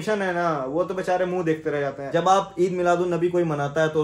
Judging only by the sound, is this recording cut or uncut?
cut